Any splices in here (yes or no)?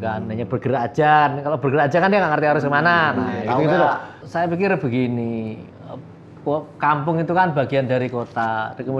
yes